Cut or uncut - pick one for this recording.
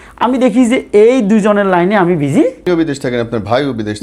cut